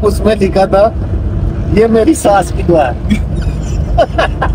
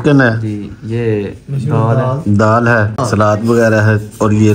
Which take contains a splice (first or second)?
second